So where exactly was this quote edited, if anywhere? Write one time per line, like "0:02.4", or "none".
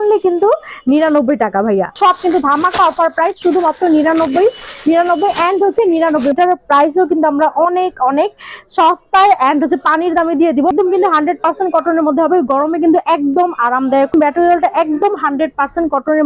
0:01.9
0:06.3
0:10.7
0:14.1